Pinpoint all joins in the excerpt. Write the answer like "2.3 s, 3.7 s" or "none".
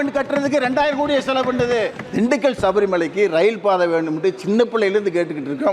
2.0 s